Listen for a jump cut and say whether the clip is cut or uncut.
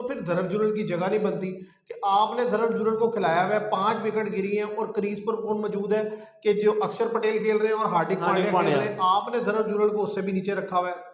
uncut